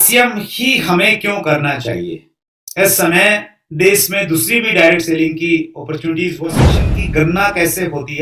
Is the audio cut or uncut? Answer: cut